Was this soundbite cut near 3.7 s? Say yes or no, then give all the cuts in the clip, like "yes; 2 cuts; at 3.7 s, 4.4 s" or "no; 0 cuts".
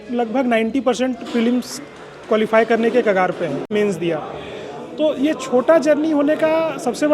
yes; 1 cut; at 3.7 s